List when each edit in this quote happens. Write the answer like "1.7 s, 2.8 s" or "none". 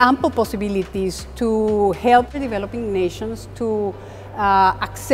2.4 s